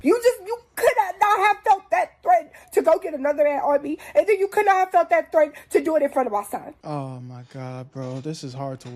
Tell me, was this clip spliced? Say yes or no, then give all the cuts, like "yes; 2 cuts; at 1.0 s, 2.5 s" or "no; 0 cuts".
yes; 1 cut; at 6.8 s